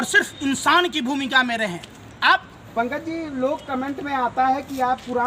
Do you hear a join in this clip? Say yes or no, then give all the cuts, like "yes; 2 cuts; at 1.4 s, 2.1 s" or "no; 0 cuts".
yes; 1 cut; at 2.6 s